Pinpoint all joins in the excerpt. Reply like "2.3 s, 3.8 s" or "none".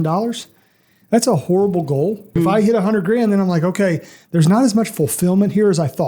2.3 s